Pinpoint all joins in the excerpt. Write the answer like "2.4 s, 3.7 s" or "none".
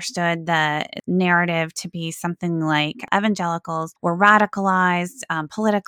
1.0 s, 3.0 s, 3.9 s